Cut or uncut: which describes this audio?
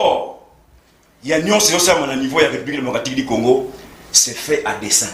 uncut